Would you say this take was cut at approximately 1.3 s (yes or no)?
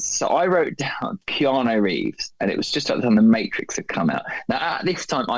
yes